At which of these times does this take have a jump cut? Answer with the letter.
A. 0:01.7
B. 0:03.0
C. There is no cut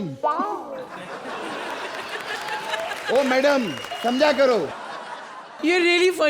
C